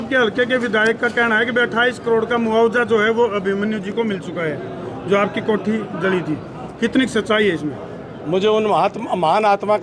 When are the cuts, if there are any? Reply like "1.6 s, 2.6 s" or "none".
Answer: none